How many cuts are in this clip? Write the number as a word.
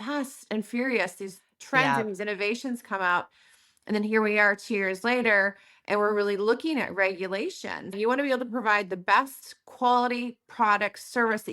one